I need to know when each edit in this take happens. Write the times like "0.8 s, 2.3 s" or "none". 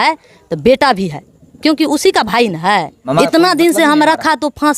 3.0 s

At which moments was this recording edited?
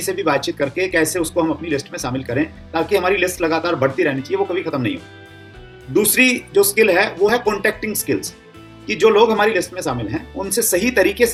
none

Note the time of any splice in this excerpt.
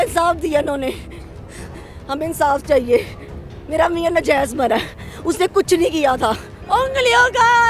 6.5 s

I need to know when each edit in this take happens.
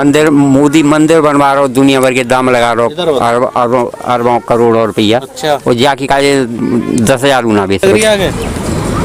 7.8 s

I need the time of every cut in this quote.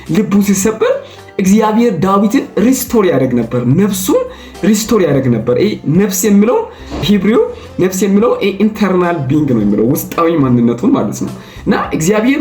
7.0 s

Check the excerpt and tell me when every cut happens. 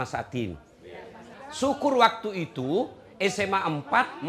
1.3 s

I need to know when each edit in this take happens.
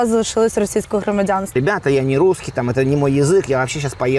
1.5 s

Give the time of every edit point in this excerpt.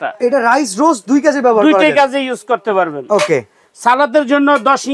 none

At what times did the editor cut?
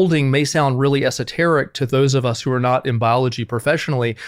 none

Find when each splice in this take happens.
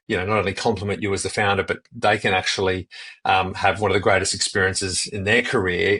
none

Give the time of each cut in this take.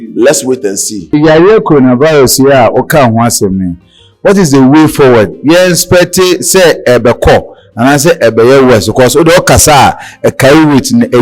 1.1 s

